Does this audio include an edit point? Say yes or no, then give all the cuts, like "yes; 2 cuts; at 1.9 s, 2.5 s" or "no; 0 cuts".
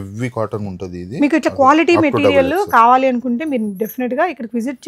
no; 0 cuts